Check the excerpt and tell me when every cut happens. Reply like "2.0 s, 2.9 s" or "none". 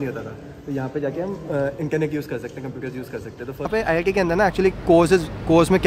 3.7 s